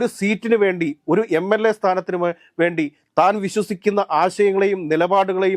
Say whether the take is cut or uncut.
uncut